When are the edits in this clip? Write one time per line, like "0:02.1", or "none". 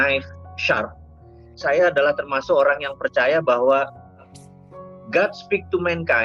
0:01.5